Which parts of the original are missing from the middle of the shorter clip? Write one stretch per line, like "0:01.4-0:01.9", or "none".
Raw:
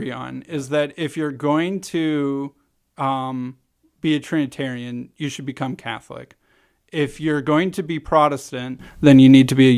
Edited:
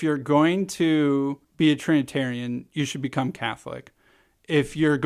0:02.6-0:03.9